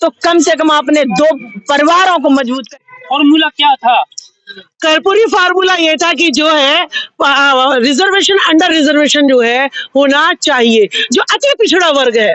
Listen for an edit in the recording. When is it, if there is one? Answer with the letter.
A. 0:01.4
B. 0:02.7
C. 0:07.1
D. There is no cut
B